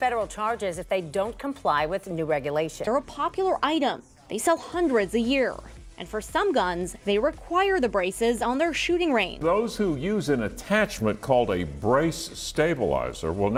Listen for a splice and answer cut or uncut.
uncut